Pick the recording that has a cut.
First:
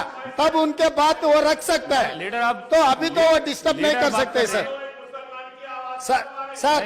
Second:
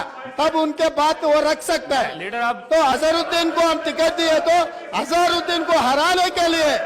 second; 1 cut; at 2.6 s

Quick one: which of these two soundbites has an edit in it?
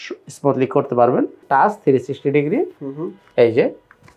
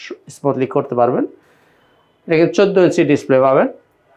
first; 1 cut; at 1.4 s

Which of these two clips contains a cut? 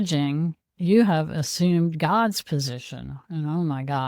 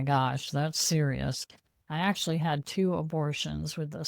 second; 1 cut; at 1.7 s

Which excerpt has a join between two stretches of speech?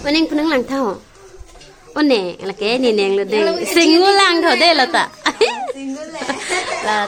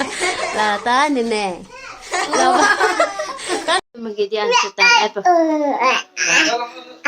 second; 1 cut; at 3.8 s

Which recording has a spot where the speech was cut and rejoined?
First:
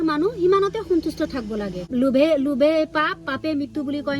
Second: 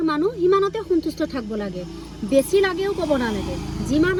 first; 1 cut; at 1.8 s

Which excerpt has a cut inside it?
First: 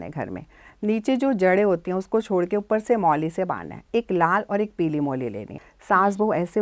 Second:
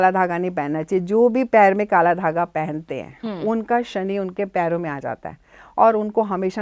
first; 1 cut; at 5.5 s

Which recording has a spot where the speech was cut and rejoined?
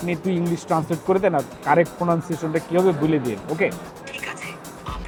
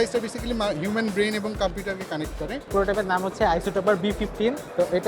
second; 1 cut; at 2.7 s

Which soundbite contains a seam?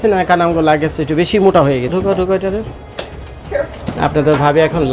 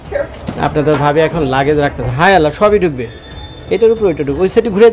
first; 1 cut; at 1.9 s

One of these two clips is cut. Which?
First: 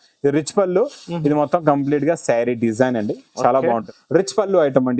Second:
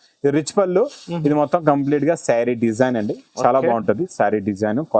first; 1 cut; at 3.8 s

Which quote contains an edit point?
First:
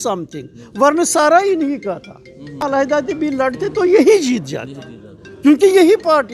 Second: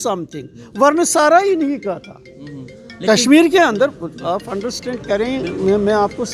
first; 1 cut; at 2.7 s

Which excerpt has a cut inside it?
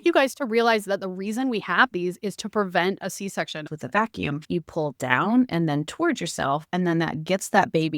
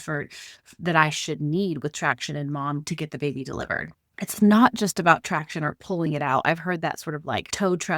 first; 1 cut; at 3.7 s

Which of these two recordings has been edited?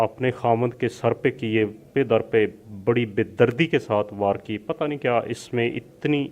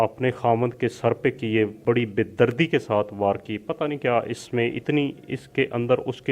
second; 2 cuts; at 1.8 s, 4.8 s

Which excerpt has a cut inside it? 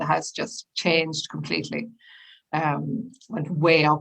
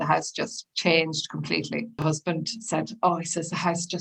second; 1 cut; at 2.0 s

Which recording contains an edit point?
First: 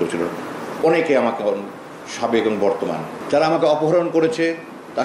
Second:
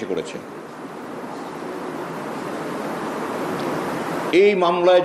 first; 1 cut; at 3.2 s

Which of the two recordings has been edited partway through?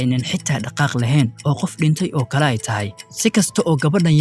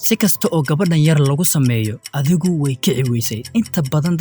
second; 2 cuts; at 2.1 s, 3.4 s

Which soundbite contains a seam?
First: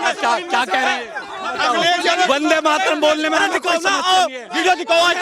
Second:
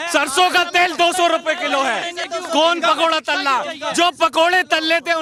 first; 1 cut; at 1.4 s

